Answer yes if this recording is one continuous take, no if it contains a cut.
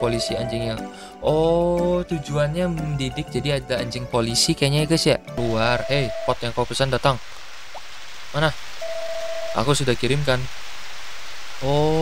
no